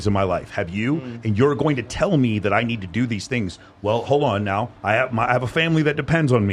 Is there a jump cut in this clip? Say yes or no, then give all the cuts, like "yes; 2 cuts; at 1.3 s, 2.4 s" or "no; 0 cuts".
no; 0 cuts